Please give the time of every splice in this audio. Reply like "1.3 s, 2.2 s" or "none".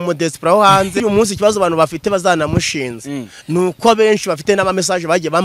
1.0 s